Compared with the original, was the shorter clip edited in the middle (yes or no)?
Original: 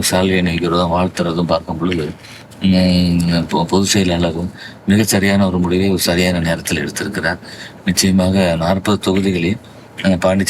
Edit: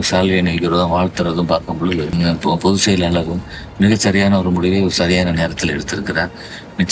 yes